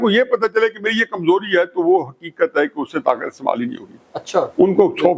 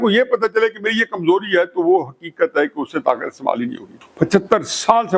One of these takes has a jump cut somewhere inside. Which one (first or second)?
second